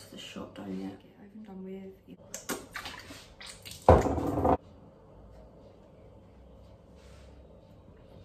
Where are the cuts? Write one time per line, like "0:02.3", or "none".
0:02.2
0:04.5